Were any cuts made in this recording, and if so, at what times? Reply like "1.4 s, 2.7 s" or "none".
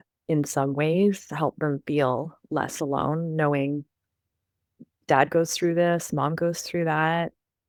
none